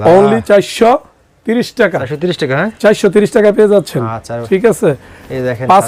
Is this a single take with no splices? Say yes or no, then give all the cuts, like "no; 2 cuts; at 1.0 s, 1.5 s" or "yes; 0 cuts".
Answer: yes; 0 cuts